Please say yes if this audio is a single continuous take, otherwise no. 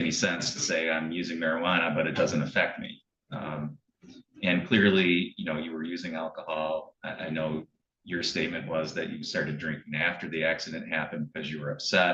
yes